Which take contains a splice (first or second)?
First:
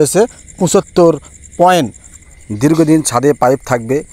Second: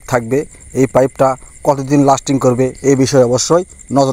first